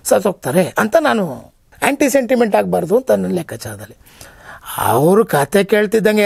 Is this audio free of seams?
no; 1 cut; at 1.7 s

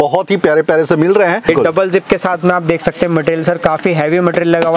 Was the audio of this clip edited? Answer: yes; 1 cut; at 1.5 s

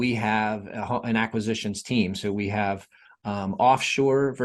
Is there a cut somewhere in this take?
no; 0 cuts

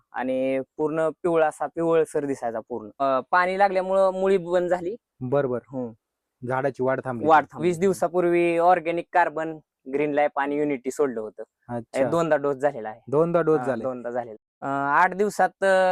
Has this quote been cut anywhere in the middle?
yes; 3 cuts; at 2.9 s, 7.6 s, 14.3 s

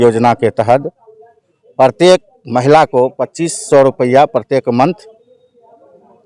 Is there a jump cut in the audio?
no; 0 cuts

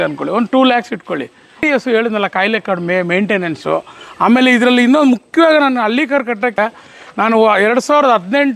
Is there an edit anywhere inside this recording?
yes; 2 cuts; at 1.6 s, 6.6 s

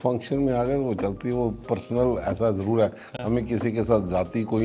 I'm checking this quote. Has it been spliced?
no; 0 cuts

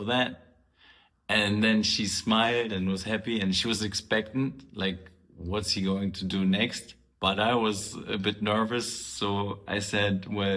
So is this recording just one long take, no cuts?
yes; 0 cuts

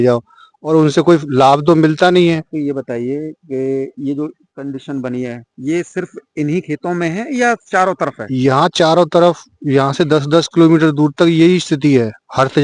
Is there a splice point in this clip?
no; 0 cuts

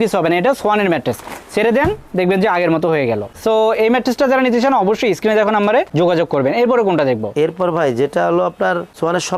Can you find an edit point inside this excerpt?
no; 0 cuts

